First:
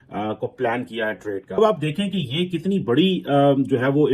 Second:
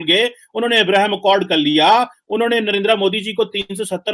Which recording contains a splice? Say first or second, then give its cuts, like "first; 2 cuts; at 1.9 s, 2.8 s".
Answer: first; 1 cut; at 1.4 s